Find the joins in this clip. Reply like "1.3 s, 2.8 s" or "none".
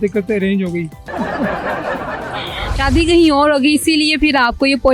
1.1 s, 2.7 s